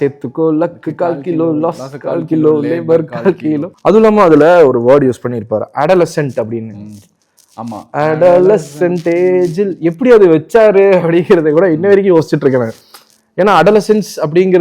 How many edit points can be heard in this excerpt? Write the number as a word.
one